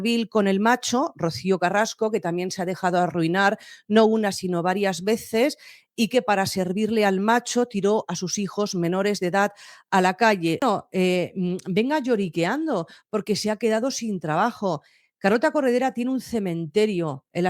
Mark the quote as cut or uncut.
cut